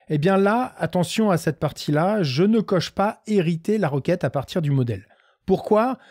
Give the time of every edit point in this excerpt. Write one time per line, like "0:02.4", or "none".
none